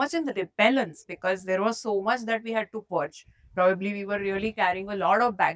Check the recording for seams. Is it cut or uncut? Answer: uncut